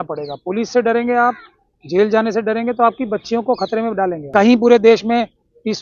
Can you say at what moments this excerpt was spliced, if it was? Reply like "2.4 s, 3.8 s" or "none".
4.2 s